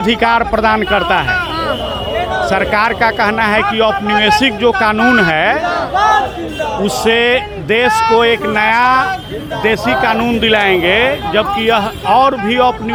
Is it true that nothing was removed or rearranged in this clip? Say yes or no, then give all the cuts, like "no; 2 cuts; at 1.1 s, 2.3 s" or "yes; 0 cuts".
yes; 0 cuts